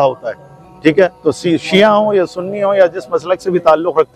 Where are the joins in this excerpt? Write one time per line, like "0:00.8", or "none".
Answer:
none